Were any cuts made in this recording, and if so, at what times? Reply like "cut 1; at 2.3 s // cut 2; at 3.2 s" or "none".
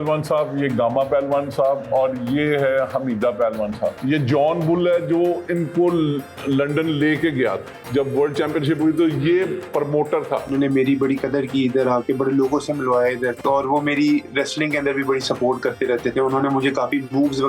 cut 1; at 4.0 s // cut 2; at 7.7 s // cut 3; at 10.5 s // cut 4; at 13.4 s